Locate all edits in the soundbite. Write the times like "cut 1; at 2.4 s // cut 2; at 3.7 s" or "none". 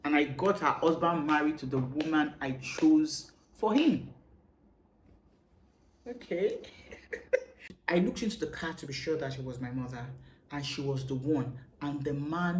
cut 1; at 7.6 s